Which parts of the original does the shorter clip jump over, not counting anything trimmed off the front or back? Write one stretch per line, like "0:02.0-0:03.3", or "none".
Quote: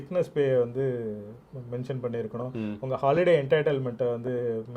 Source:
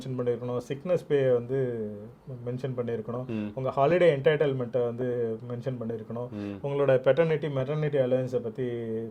none